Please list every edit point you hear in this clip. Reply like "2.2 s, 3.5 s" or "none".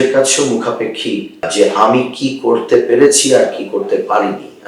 1.5 s